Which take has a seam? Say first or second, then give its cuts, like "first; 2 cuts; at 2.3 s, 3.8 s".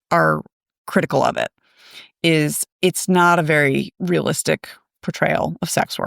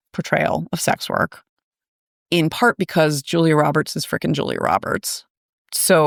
first; 1 cut; at 3.9 s